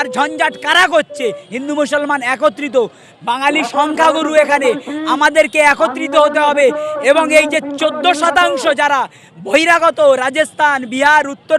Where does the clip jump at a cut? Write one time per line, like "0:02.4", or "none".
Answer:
0:01.4